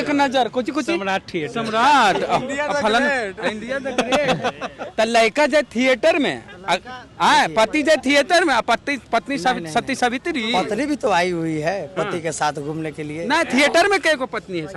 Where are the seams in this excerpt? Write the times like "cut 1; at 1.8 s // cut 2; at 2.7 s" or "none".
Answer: none